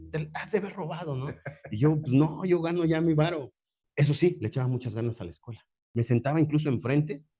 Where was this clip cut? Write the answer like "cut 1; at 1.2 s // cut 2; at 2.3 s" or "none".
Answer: cut 1; at 3.8 s // cut 2; at 5.8 s